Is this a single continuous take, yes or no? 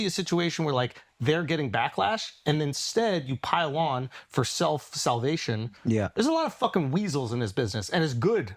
no